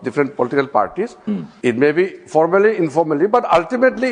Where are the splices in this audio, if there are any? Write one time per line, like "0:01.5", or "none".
0:01.5